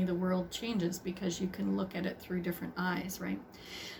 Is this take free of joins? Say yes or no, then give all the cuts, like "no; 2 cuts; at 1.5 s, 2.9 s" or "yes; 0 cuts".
yes; 0 cuts